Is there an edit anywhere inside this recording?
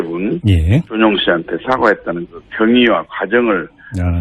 no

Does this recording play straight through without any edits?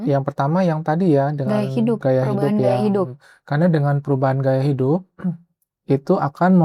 yes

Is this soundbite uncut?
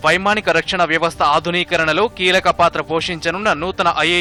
yes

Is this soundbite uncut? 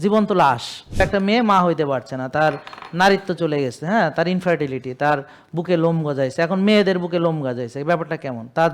no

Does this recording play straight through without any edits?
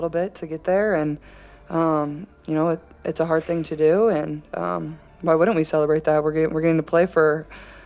yes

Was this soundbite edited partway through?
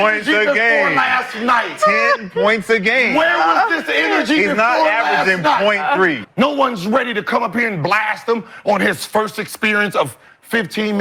yes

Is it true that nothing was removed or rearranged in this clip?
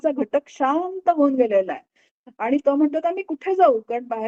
yes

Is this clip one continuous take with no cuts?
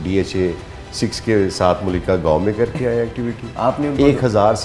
yes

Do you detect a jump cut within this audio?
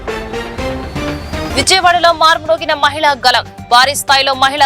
no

